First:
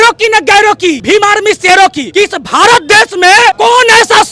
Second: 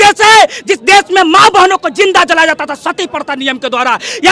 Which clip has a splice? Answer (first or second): first